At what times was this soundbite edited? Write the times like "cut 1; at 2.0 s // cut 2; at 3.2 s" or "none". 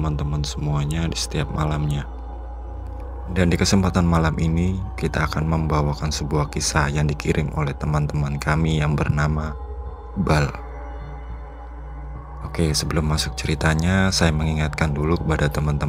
cut 1; at 12.6 s